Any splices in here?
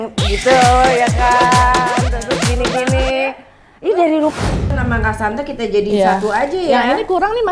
yes; 1 cut; at 4.7 s

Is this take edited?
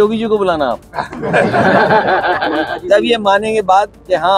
no; 0 cuts

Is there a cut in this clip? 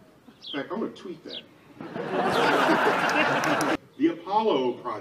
yes; 1 cut; at 3.7 s

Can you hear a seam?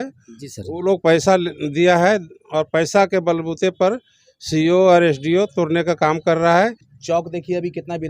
yes; 1 cut; at 6.9 s

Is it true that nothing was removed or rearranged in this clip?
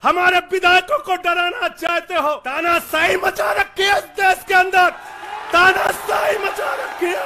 no; 1 cut; at 2.5 s

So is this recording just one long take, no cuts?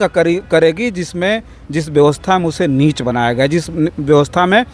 yes; 0 cuts

